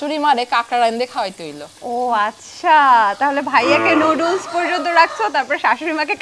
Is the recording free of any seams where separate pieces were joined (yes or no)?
yes